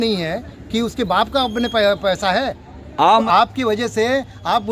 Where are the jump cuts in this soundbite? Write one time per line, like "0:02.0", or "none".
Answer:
0:03.2